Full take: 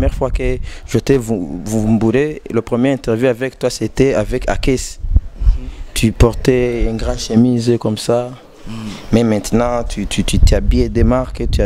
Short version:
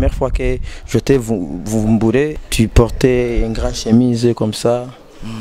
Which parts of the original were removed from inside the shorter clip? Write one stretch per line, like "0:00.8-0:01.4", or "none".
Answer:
0:02.4-0:05.8